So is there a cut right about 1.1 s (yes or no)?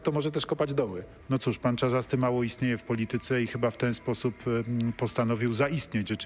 yes